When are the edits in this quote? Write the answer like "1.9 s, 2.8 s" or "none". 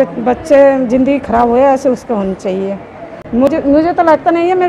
3.5 s